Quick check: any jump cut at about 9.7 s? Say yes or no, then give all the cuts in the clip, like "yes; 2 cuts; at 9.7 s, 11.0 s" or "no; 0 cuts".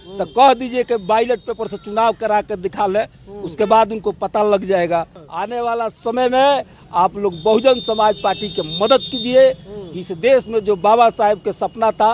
no; 1 cut; at 5.2 s